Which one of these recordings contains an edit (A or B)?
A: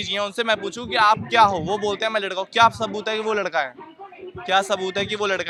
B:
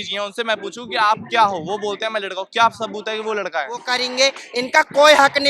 B